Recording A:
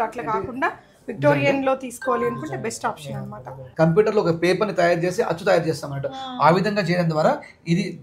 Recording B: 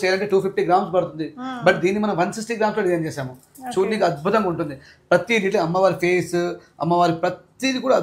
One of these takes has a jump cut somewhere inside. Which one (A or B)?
A